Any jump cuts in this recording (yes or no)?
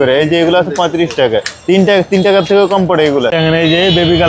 yes